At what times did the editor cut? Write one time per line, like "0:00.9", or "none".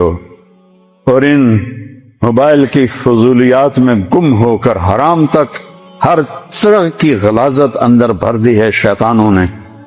none